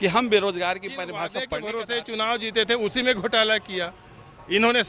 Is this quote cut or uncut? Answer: cut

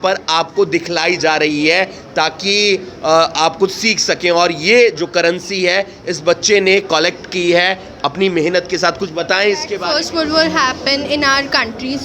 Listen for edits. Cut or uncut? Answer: cut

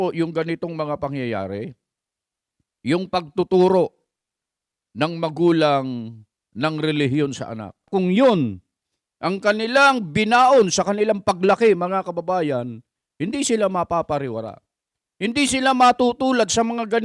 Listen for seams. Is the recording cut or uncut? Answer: cut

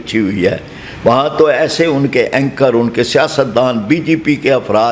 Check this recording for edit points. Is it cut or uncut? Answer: uncut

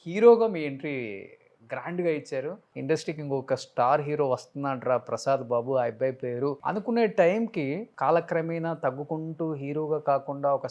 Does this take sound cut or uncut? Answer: cut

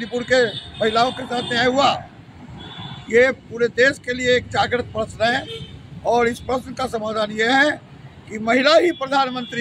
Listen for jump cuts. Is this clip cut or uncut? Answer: uncut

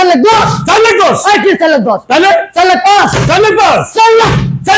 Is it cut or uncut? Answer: uncut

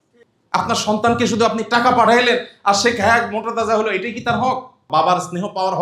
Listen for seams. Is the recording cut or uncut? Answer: cut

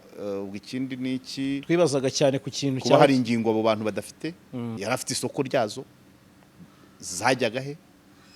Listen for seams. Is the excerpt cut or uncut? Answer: cut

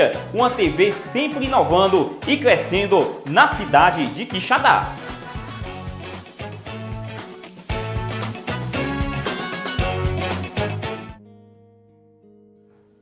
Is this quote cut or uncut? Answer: cut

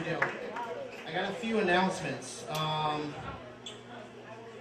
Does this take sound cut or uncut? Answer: uncut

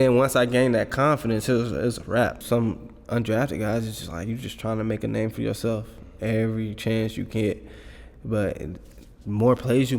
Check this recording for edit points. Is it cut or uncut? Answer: cut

